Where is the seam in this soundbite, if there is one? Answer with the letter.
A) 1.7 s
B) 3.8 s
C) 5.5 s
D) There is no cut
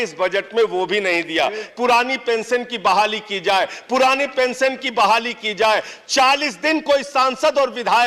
A